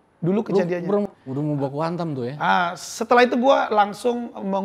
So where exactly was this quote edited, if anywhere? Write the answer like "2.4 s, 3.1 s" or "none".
1.1 s